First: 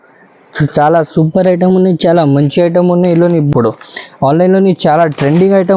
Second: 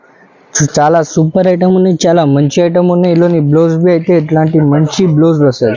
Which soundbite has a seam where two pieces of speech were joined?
first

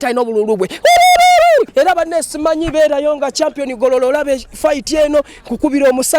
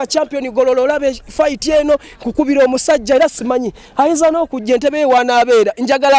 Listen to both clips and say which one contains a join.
first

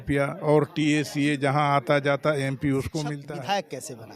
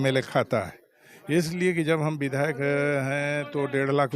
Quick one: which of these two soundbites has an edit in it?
first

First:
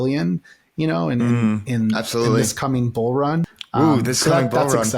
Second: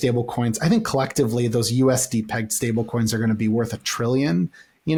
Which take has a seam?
first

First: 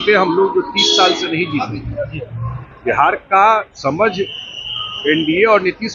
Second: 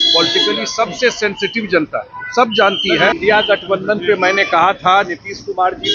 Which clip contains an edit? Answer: second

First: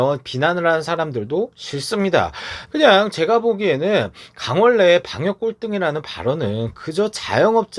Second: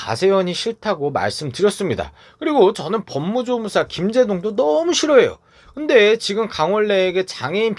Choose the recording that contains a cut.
first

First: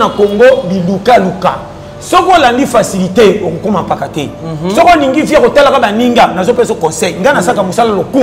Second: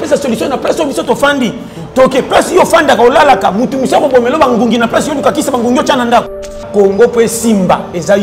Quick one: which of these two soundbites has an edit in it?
second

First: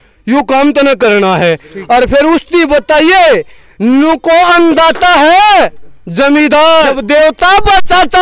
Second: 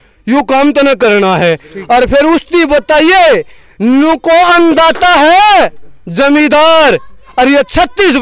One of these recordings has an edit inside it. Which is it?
first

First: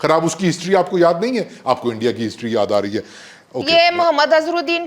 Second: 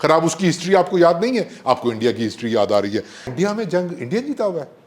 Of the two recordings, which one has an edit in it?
second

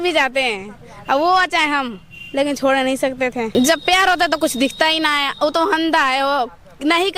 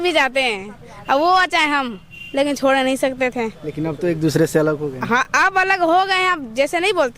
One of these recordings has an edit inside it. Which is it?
first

